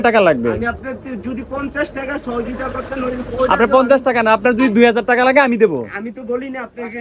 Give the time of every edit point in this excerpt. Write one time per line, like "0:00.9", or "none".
none